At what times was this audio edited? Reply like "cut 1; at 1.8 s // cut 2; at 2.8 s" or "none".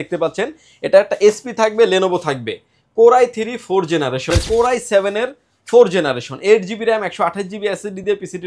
cut 1; at 4.2 s